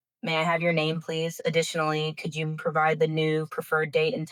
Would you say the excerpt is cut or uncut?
uncut